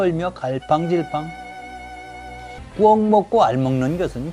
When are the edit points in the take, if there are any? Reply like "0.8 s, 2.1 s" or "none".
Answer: 2.6 s